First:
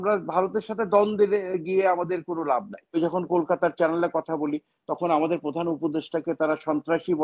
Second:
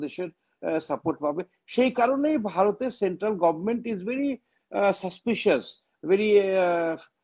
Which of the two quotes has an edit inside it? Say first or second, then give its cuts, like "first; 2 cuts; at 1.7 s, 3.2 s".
first; 1 cut; at 3.0 s